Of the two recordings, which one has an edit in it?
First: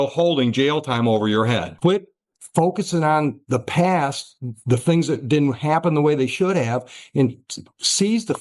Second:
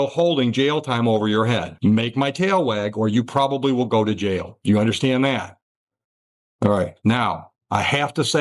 first; 1 cut; at 1.7 s

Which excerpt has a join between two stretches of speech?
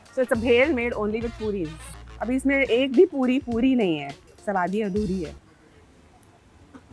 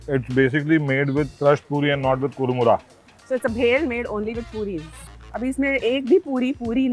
second; 1 cut; at 1.3 s

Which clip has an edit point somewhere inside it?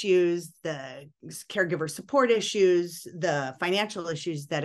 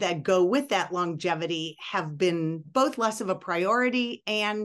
second; 1 cut; at 2.6 s

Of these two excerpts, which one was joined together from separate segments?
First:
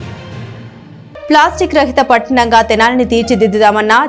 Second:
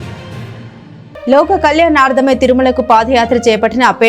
first; 1 cut; at 1.2 s

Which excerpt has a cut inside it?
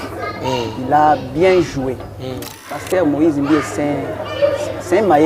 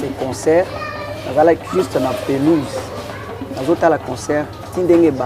first; 1 cut; at 2.8 s

